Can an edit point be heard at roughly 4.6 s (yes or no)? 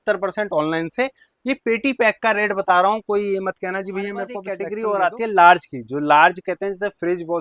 yes